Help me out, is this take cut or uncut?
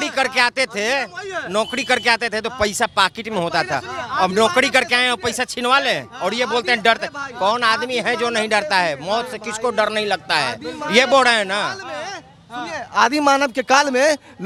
uncut